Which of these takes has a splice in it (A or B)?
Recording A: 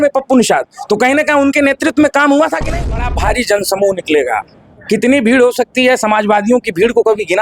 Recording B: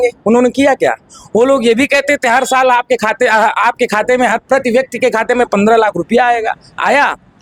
A